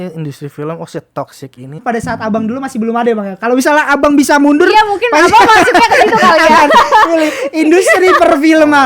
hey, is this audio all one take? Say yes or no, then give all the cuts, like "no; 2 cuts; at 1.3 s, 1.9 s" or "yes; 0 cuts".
no; 1 cut; at 1.8 s